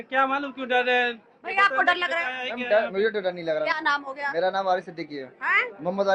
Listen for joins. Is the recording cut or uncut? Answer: uncut